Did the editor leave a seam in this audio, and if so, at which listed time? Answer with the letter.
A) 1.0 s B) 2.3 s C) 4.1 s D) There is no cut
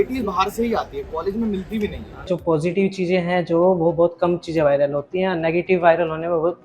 B